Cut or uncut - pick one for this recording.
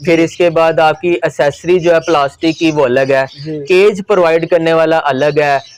uncut